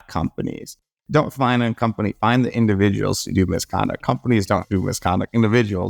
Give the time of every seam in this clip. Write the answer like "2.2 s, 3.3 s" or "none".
0.9 s